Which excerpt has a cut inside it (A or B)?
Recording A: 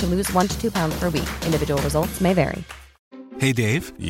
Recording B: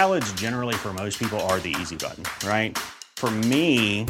A